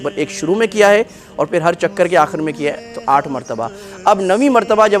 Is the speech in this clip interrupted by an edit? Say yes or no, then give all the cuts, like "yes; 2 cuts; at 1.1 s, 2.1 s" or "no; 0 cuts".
no; 0 cuts